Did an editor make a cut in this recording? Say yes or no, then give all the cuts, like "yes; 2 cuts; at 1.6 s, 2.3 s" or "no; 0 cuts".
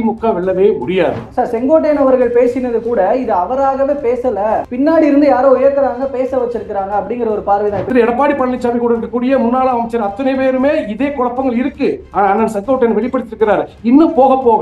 yes; 2 cuts; at 1.3 s, 7.9 s